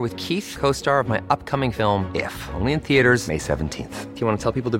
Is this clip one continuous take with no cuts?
yes; 0 cuts

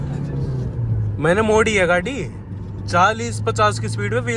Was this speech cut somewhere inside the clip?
no; 0 cuts

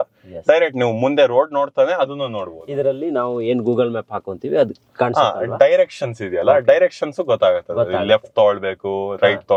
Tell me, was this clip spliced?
no; 0 cuts

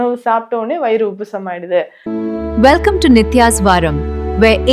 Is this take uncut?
no; 1 cut; at 2.0 s

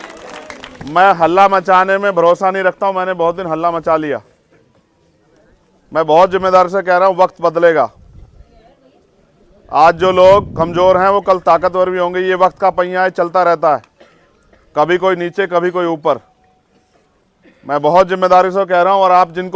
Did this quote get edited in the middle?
no; 0 cuts

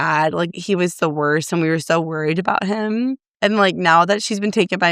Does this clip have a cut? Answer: no; 0 cuts

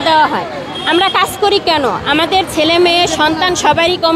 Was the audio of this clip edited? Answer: no; 0 cuts

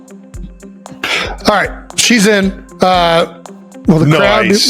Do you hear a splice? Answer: yes; 1 cut; at 1.0 s

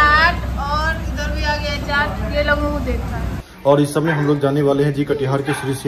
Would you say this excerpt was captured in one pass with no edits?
no; 1 cut; at 3.4 s

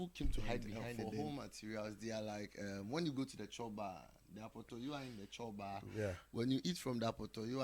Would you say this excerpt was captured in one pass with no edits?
no; 1 cut; at 1.1 s

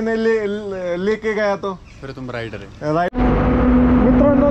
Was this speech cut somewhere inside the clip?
yes; 1 cut; at 3.1 s

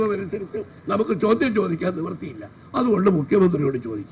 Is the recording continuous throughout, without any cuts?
yes; 0 cuts

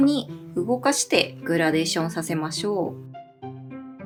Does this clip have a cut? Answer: no; 0 cuts

